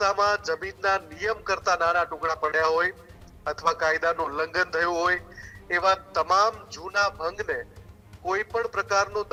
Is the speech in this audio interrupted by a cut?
no; 0 cuts

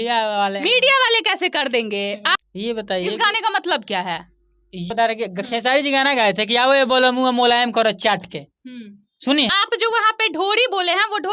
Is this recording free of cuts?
no; 3 cuts; at 2.4 s, 4.9 s, 9.5 s

